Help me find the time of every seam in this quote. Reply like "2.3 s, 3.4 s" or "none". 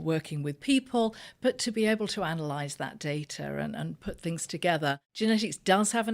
5.1 s

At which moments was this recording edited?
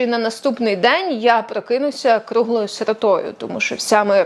none

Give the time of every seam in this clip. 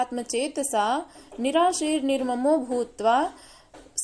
none

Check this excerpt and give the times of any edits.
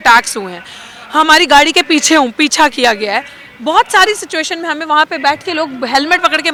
none

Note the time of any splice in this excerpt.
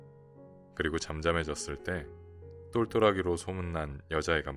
none

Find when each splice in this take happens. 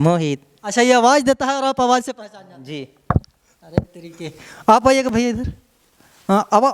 none

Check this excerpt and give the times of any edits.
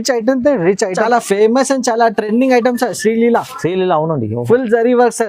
1.0 s

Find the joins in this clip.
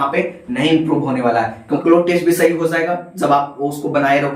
1.8 s

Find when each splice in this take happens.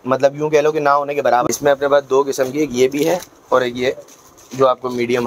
1.5 s

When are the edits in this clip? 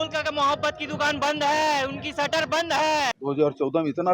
3.1 s

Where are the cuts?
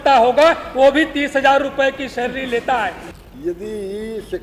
3.1 s

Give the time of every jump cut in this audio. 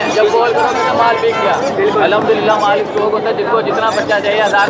none

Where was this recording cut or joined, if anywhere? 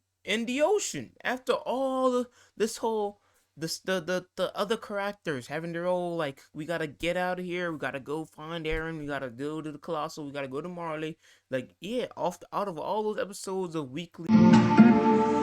14.1 s

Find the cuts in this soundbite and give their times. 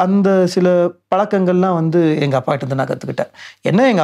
none

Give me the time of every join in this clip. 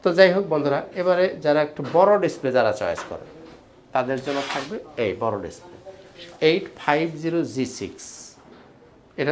none

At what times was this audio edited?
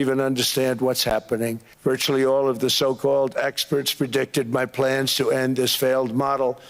1.7 s

